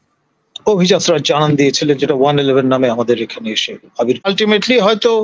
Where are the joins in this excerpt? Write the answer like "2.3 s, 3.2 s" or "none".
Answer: 4.3 s